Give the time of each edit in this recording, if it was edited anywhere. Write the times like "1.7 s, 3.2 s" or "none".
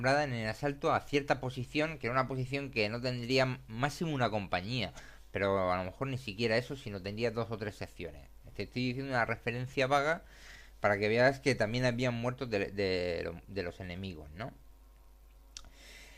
12.7 s

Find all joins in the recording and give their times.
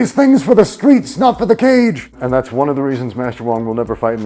2.2 s

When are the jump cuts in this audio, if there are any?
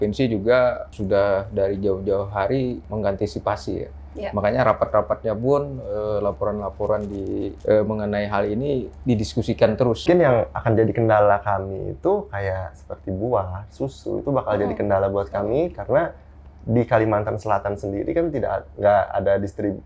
0.9 s, 2.8 s, 7.5 s, 10.0 s

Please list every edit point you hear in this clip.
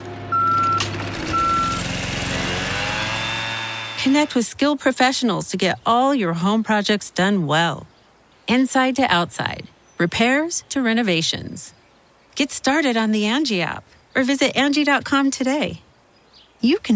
none

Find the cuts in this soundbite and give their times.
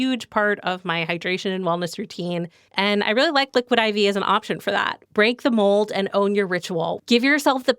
2.6 s, 5.0 s, 6.9 s

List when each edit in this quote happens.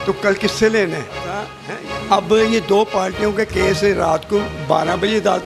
1.5 s

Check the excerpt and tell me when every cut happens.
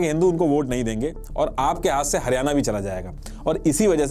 3.1 s

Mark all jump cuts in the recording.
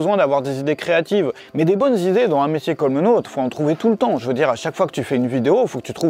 1.4 s

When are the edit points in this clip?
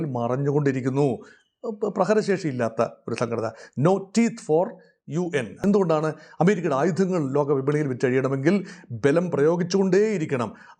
5.6 s

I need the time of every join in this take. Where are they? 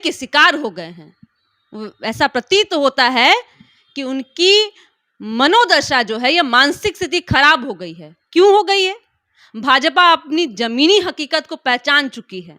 none

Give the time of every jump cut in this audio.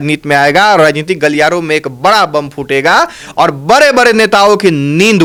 none

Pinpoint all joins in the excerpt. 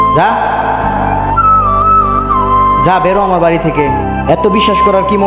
none

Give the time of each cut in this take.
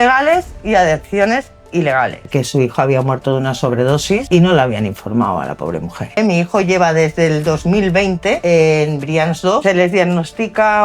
2.3 s, 4.2 s, 6.2 s, 8.4 s, 9.6 s

